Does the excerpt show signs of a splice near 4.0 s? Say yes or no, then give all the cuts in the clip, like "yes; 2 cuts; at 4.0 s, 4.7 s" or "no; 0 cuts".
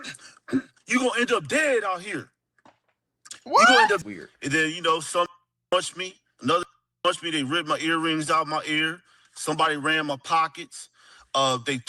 yes; 1 cut; at 4.0 s